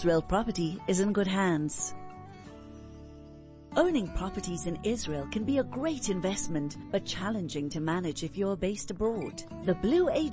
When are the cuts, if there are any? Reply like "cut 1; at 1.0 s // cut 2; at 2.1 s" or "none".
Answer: cut 1; at 1.7 s // cut 2; at 3.6 s

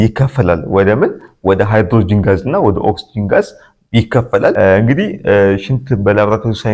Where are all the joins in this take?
cut 1; at 4.5 s

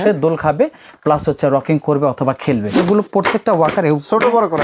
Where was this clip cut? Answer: cut 1; at 2.8 s

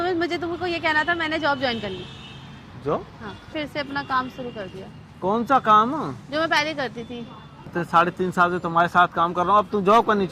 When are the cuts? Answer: cut 1; at 3.5 s // cut 2; at 7.7 s

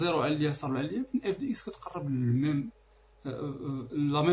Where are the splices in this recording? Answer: none

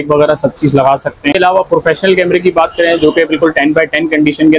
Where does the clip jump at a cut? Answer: cut 1; at 1.3 s

